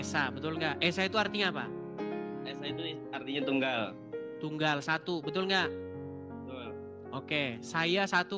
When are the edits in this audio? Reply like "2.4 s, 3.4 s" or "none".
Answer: none